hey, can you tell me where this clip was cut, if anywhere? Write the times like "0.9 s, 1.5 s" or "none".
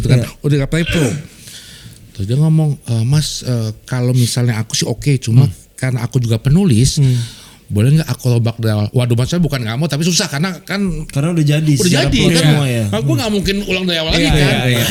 none